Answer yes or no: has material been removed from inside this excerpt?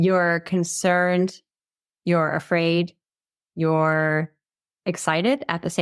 no